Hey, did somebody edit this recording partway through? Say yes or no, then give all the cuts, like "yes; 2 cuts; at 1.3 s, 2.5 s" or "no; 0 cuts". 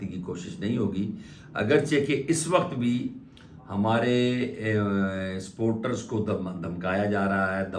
no; 0 cuts